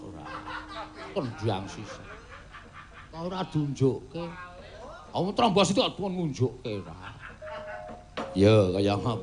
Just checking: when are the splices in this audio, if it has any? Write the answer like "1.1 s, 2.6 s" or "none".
none